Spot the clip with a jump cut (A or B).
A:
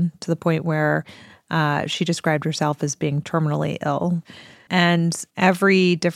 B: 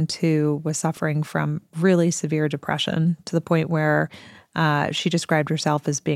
A